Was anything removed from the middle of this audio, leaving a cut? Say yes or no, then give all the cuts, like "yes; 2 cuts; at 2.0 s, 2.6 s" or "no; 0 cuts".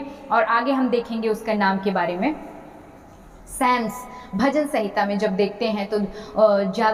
no; 0 cuts